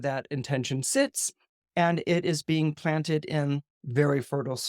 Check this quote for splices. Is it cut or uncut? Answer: cut